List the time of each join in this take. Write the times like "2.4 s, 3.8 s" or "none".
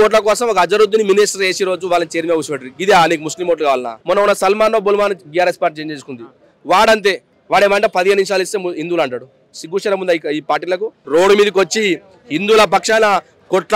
3.9 s, 10.9 s